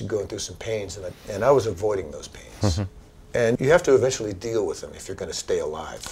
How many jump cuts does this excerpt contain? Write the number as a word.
one